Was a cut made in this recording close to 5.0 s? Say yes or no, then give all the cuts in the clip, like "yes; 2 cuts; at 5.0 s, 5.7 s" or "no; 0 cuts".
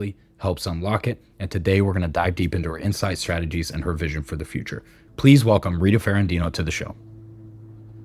yes; 1 cut; at 5.0 s